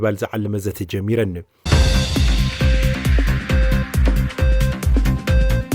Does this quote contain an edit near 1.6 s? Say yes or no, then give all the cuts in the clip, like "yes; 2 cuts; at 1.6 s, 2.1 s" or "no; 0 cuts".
yes; 1 cut; at 1.6 s